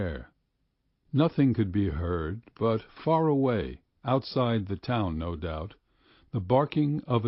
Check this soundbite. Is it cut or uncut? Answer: uncut